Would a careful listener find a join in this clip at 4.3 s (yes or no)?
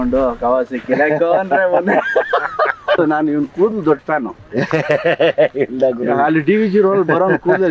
no